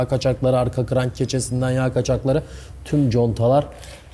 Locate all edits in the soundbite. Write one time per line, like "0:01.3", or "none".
none